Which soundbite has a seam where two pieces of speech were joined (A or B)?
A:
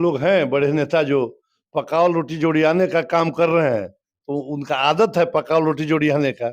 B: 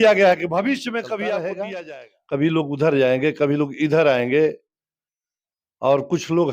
B